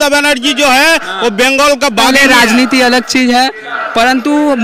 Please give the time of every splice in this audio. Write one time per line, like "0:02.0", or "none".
0:02.1